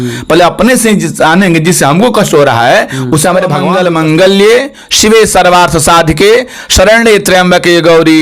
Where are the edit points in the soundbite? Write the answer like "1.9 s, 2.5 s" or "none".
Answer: 3.7 s